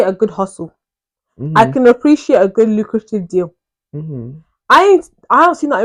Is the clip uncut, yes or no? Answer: yes